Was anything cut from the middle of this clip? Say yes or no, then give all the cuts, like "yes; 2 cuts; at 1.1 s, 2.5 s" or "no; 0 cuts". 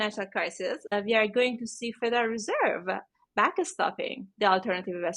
yes; 1 cut; at 0.9 s